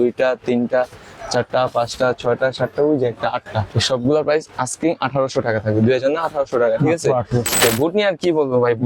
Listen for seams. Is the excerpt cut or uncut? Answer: cut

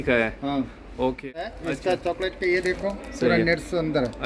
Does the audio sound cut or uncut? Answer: cut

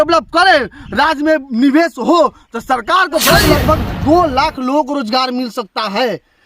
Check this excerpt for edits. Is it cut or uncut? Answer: cut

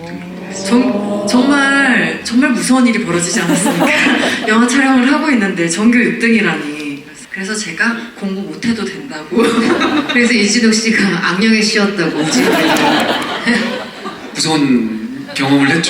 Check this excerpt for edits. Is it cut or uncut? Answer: cut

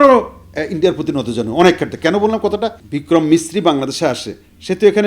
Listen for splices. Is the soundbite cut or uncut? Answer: cut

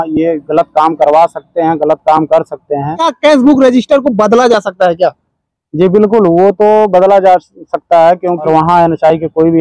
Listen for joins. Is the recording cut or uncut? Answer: cut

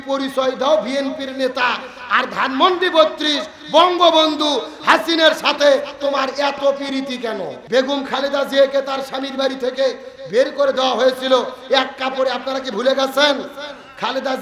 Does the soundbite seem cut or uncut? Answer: cut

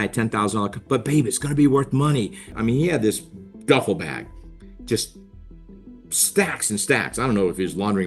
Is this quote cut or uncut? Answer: cut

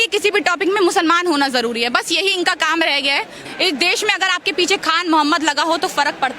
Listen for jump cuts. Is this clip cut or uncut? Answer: cut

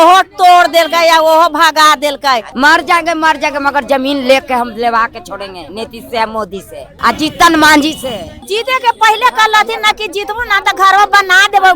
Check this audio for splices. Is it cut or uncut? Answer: cut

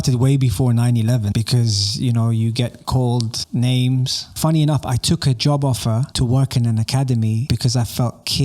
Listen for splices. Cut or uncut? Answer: cut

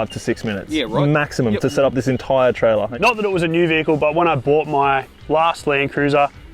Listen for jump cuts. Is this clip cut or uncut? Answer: cut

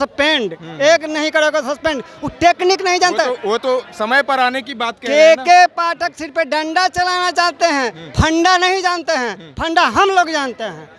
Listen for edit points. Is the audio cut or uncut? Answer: uncut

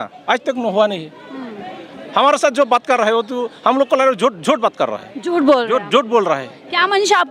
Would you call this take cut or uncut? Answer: uncut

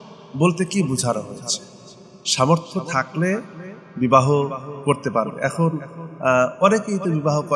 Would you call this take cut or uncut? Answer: uncut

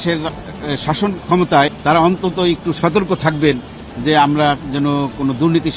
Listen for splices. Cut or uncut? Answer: cut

